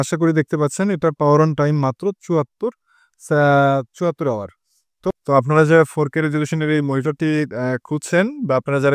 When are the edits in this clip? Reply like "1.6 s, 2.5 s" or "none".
5.1 s